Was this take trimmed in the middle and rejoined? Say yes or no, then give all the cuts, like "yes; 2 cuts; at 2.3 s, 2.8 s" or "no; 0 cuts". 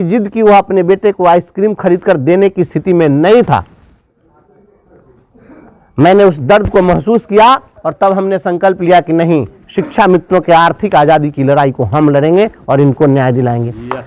no; 0 cuts